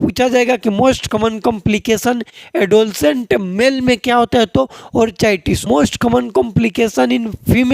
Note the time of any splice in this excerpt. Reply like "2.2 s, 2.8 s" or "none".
5.6 s